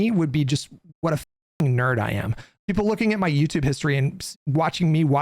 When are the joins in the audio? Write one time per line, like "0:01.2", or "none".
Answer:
0:02.5